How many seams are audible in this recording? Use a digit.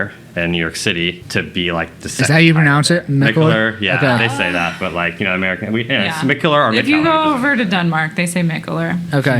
1